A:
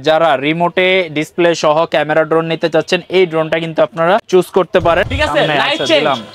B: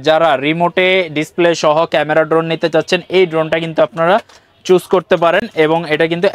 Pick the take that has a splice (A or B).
A